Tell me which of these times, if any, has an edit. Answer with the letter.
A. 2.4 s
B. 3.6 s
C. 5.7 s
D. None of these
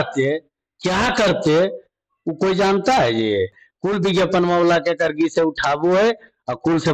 B